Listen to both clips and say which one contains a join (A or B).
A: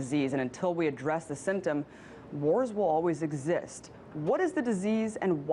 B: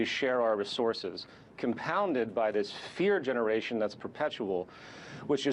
A